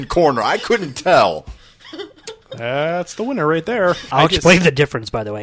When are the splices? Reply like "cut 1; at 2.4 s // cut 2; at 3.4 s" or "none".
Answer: cut 1; at 4.1 s